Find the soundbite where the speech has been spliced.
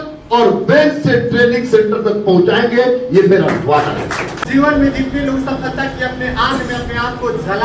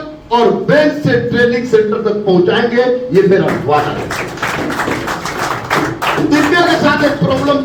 first; 1 cut; at 4.4 s

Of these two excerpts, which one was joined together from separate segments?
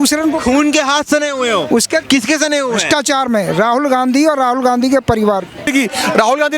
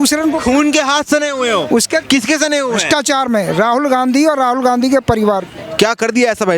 first; 1 cut; at 5.7 s

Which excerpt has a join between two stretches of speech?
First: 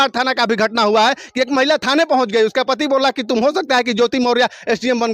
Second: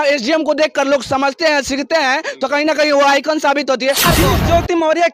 second; 1 cut; at 4.1 s

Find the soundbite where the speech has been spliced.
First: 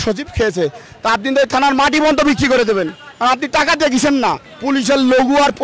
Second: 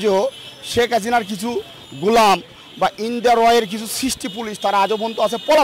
first; 2 cuts; at 0.9 s, 4.5 s

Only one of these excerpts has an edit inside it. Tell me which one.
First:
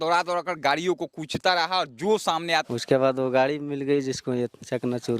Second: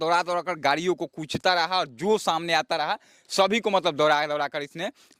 first; 1 cut; at 2.7 s

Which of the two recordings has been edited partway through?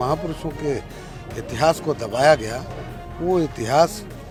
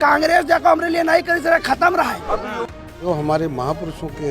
second; 1 cut; at 2.7 s

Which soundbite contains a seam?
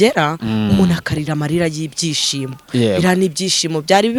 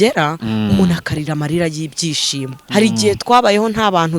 second; 1 cut; at 2.5 s

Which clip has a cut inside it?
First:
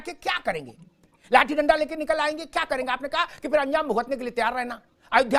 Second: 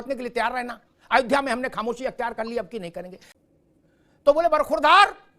second; 1 cut; at 3.3 s

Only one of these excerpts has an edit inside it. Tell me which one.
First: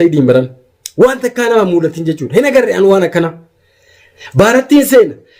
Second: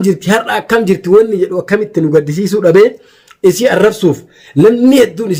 first; 1 cut; at 4.2 s

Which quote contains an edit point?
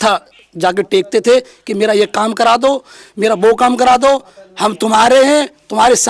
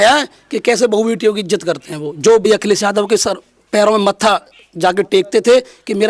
second; 1 cut; at 2.4 s

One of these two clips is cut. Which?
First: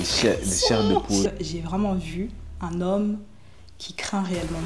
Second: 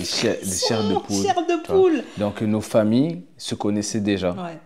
first; 1 cut; at 1.3 s

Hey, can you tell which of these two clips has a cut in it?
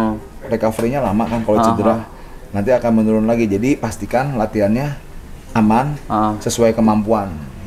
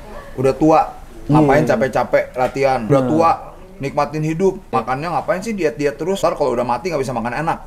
second; 3 cuts; at 2.9 s, 4.7 s, 6.2 s

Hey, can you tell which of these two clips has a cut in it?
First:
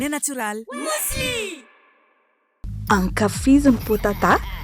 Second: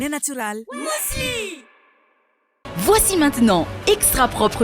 second; 1 cut; at 2.7 s

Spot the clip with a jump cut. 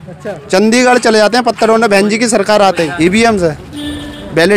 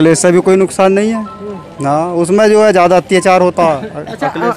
first; 1 cut; at 2.9 s

